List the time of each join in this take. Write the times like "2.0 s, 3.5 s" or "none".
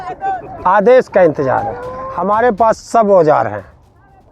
2.4 s